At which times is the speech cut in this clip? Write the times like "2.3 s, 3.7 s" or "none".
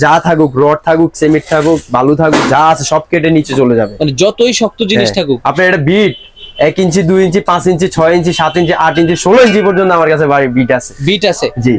none